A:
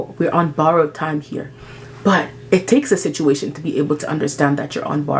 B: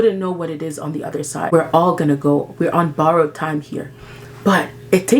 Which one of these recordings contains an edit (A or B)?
B